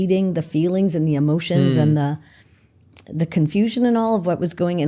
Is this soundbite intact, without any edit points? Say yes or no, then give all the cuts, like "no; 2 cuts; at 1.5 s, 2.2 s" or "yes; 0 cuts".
yes; 0 cuts